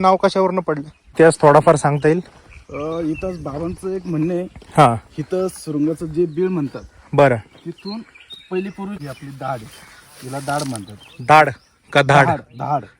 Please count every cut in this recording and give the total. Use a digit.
2